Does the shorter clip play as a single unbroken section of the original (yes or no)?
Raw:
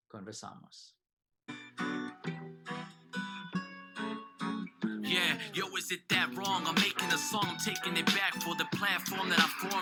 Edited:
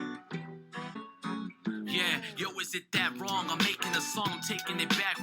no